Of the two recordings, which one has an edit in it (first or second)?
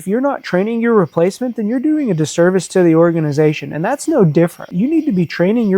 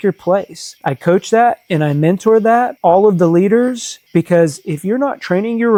first